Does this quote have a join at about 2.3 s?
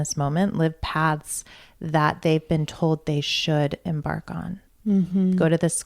no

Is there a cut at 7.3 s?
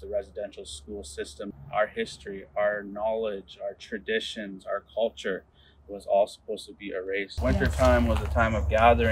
yes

